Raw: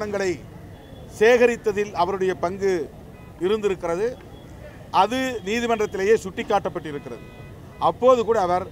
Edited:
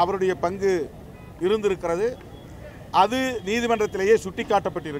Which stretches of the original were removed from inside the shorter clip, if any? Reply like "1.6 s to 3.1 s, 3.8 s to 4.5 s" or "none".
none